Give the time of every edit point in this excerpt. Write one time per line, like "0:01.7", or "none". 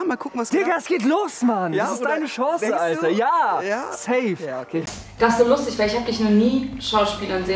none